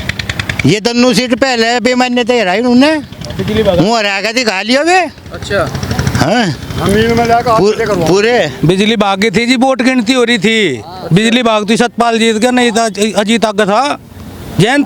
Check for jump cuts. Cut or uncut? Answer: uncut